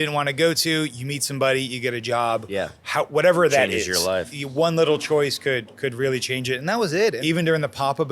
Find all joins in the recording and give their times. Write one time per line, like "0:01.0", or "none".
0:04.3
0:07.2